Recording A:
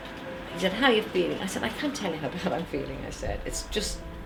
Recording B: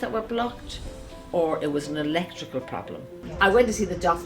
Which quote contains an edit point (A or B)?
B